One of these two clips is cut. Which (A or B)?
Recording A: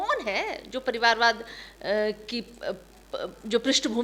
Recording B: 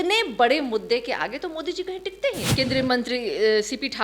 B